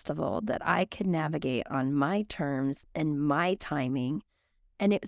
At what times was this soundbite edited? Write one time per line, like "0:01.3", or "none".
none

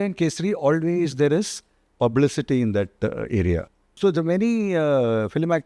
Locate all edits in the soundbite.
0:03.9

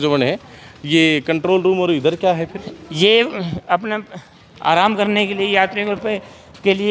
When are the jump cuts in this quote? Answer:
none

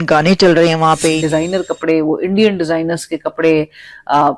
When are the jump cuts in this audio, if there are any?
0:01.2

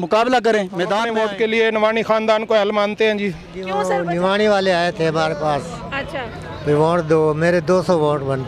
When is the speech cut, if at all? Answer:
0:01.1
0:03.8

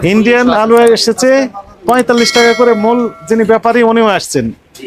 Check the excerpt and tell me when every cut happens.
none

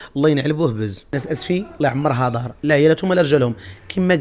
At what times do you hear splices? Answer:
0:01.0

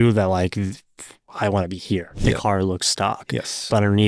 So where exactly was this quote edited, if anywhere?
0:02.2

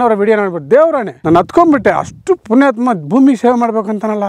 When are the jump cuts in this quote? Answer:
0:01.1

